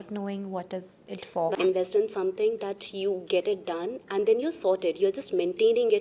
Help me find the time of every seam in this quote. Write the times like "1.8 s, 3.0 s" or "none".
1.5 s